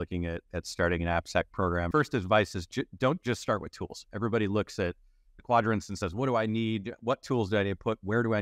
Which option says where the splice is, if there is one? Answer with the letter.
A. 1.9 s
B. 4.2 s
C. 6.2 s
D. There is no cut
A